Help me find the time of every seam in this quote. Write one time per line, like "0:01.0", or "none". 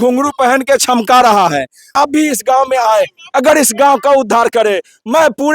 0:01.9